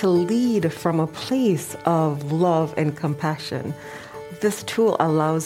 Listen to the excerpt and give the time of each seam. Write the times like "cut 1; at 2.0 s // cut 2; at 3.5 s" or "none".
none